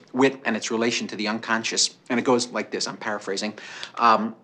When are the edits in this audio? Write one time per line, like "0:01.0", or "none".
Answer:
0:01.9